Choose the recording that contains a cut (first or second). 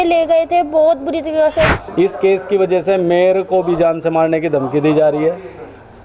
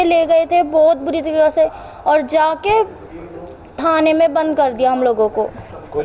first